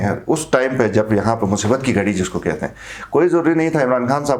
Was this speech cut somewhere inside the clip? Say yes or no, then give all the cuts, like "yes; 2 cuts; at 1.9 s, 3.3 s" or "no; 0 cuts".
no; 0 cuts